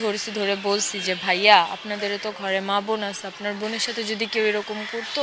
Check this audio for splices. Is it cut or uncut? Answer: uncut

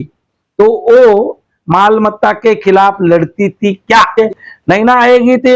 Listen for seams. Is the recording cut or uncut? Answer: cut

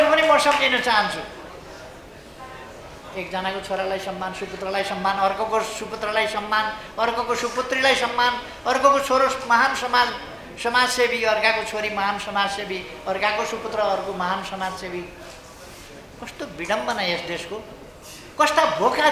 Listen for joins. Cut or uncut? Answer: uncut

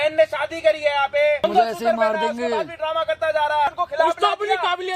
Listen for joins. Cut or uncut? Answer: cut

